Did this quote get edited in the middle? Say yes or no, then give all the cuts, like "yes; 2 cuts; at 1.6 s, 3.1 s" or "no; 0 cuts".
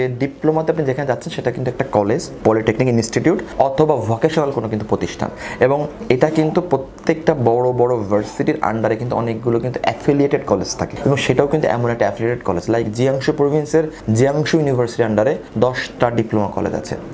no; 0 cuts